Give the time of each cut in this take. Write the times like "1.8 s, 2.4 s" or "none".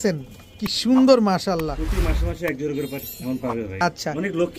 3.7 s